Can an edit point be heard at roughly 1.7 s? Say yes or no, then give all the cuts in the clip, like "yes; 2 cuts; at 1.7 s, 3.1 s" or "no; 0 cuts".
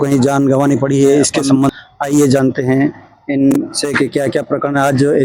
yes; 1 cut; at 1.7 s